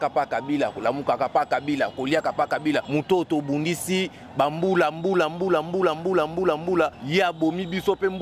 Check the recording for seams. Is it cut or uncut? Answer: cut